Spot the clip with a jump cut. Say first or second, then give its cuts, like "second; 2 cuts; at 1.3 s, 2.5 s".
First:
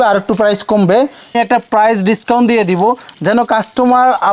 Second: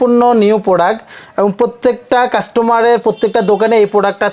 first; 1 cut; at 1.3 s